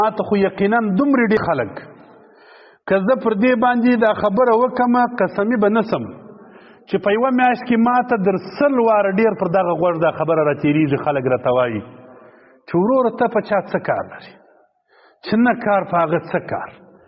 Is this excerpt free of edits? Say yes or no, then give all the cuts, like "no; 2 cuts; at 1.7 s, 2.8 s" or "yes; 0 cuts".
no; 1 cut; at 1.4 s